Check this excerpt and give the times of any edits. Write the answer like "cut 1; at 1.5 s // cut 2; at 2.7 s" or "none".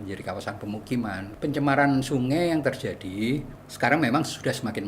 cut 1; at 1.3 s // cut 2; at 3.6 s